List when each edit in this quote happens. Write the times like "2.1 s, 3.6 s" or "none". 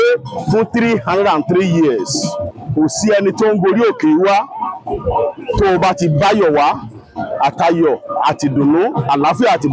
2.5 s